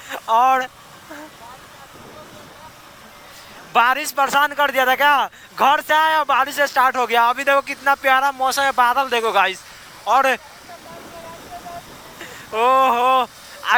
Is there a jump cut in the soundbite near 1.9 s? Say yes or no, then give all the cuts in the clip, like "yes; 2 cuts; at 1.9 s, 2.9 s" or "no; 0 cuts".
no; 0 cuts